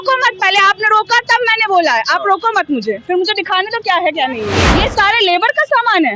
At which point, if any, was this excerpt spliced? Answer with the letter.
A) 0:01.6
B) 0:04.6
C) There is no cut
B